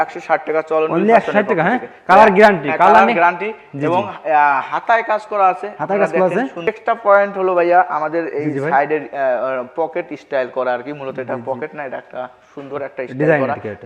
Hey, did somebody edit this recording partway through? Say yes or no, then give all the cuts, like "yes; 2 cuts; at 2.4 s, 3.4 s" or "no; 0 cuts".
yes; 1 cut; at 6.7 s